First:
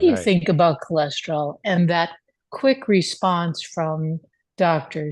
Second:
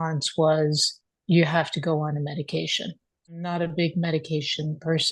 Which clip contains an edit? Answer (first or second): second